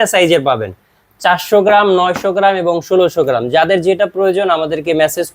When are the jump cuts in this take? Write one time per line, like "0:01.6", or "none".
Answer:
none

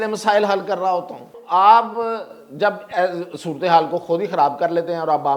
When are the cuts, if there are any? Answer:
0:01.4

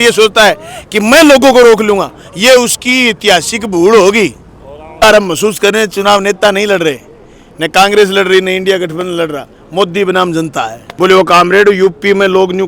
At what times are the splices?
0:05.0
0:10.9

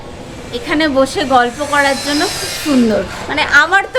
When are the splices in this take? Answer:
none

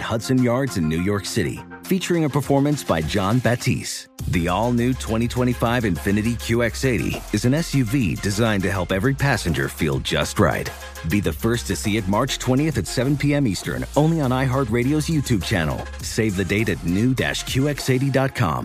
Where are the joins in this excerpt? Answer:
none

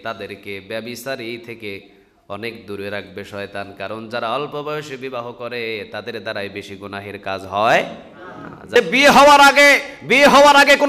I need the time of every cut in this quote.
0:08.6

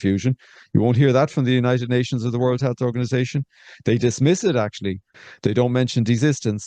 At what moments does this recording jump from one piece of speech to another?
none

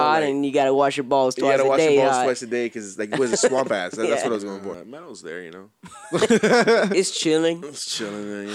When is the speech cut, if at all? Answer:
0:04.8

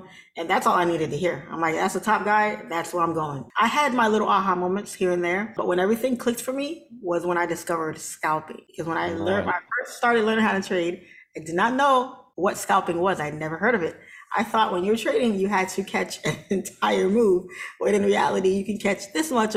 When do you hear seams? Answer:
0:03.4
0:05.6
0:08.6
0:12.2

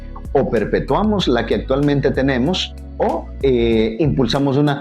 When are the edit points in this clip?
0:03.3

